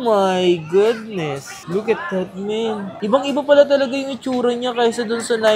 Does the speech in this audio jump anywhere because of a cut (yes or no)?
no